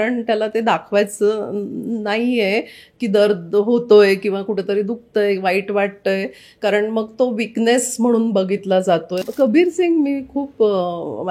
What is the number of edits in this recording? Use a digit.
1